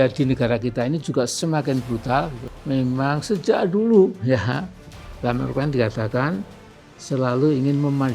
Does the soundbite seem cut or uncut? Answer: cut